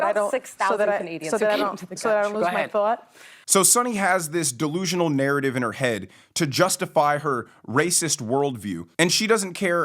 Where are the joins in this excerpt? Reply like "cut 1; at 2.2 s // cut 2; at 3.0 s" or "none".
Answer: none